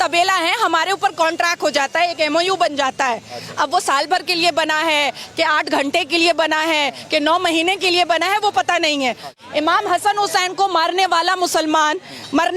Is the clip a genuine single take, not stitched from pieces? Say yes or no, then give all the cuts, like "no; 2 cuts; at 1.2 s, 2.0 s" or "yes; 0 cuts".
no; 1 cut; at 9.4 s